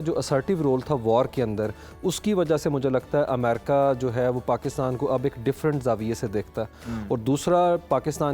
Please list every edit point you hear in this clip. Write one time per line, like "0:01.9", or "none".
none